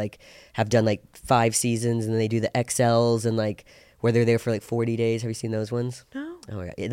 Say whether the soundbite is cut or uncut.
uncut